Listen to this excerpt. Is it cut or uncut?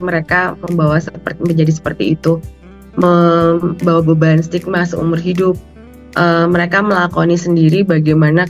uncut